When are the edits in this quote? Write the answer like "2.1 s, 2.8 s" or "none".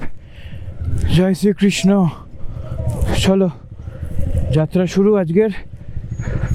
none